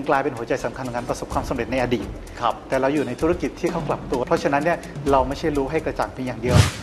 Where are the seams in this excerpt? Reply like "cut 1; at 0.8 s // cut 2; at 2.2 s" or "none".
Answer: cut 1; at 2.2 s // cut 2; at 4.2 s